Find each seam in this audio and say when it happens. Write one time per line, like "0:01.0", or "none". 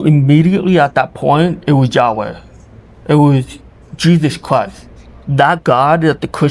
none